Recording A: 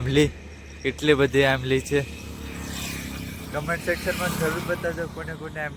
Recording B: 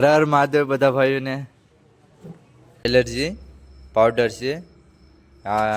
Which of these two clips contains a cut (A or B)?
B